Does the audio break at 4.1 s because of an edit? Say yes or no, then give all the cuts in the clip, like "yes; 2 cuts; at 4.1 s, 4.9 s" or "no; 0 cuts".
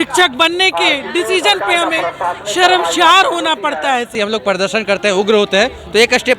yes; 1 cut; at 4.1 s